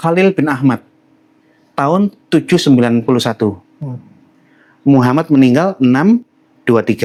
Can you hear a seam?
no; 0 cuts

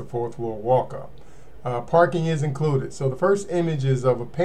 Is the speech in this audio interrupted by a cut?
no; 0 cuts

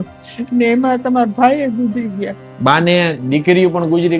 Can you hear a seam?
yes; 1 cut; at 2.4 s

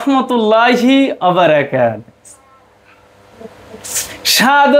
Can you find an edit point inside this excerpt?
no; 0 cuts

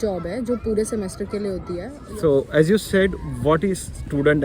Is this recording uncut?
no; 1 cut; at 2.1 s

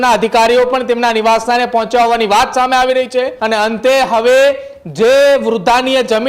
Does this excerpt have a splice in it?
yes; 1 cut; at 3.4 s

